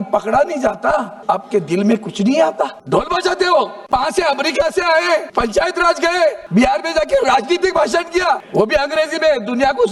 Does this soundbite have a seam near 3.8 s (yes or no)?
yes